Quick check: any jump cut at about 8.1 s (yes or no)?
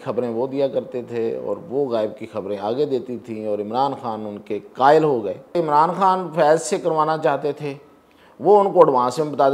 no